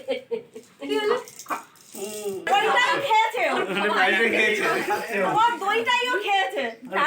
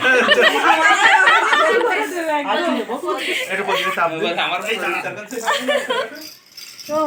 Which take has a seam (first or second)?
first